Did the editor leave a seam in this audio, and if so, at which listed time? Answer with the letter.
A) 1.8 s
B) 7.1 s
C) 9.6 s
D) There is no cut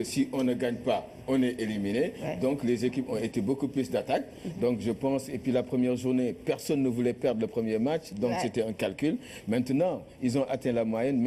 C